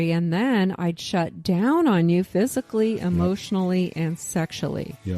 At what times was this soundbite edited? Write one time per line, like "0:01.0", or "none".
0:04.2